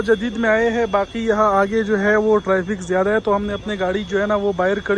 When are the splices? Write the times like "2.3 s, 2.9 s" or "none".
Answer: none